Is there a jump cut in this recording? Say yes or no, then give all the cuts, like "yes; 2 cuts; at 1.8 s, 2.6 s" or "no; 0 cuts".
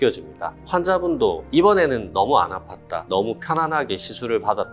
yes; 2 cuts; at 1.5 s, 3.0 s